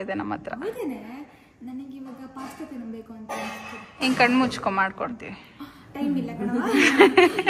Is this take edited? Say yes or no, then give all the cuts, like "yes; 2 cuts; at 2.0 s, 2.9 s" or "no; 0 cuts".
no; 0 cuts